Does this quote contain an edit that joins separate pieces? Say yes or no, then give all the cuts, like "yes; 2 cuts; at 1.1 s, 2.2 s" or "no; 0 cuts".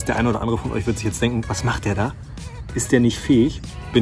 no; 0 cuts